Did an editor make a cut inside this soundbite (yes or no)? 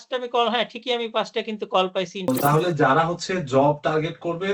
yes